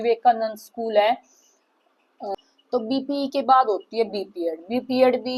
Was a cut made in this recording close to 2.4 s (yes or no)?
yes